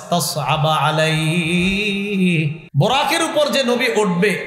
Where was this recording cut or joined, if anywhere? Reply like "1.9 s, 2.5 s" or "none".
2.6 s